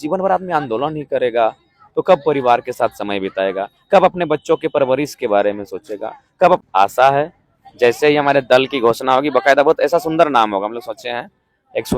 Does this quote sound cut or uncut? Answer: cut